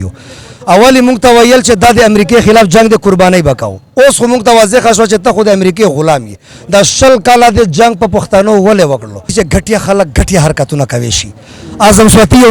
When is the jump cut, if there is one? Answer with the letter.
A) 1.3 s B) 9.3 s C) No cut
B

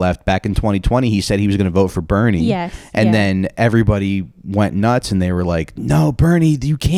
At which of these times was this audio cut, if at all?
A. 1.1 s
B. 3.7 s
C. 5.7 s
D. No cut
D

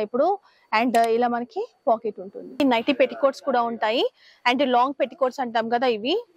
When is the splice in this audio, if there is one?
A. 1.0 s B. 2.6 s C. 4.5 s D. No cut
B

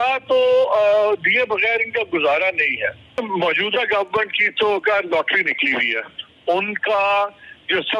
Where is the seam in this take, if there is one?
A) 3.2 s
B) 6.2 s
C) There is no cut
A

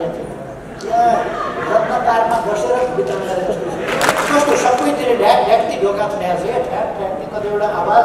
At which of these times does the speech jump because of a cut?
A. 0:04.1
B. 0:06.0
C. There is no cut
A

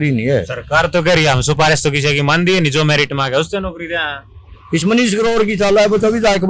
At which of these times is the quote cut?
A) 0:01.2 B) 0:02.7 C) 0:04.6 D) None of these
D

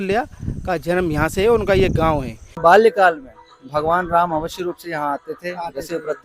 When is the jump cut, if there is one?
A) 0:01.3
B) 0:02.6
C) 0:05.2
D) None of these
B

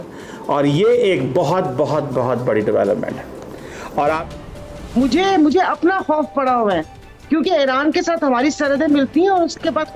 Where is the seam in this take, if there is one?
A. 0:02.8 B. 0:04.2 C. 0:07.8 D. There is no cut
B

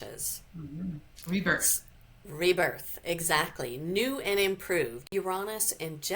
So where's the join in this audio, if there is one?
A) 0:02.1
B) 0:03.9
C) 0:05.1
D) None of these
C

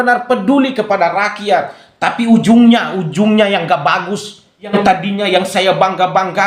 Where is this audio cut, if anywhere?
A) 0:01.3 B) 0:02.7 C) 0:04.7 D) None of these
C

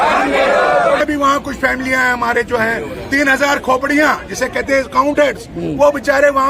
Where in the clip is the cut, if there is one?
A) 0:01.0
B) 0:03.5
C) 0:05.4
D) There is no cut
A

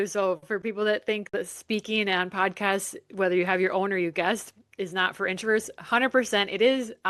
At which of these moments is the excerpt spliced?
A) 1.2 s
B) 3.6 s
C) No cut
A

